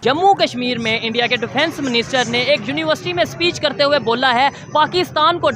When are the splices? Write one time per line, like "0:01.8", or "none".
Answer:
none